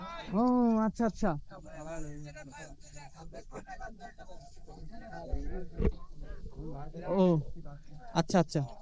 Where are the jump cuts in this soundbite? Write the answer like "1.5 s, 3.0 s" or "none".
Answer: none

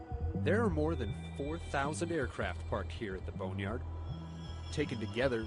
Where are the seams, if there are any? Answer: 4.1 s

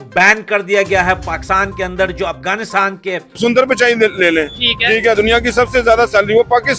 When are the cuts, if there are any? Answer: 3.4 s

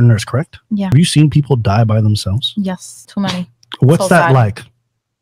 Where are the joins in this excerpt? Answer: 0.9 s, 2.9 s

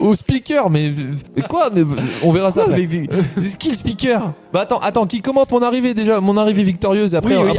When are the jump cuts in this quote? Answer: none

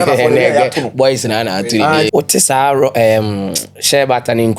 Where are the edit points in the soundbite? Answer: 2.1 s

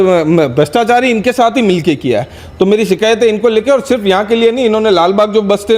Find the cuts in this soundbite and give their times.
none

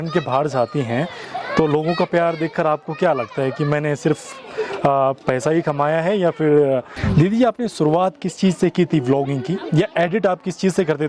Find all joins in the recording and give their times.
7.0 s

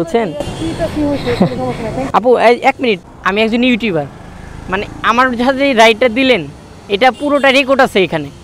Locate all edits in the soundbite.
3.1 s

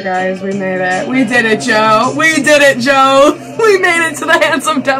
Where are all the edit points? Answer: none

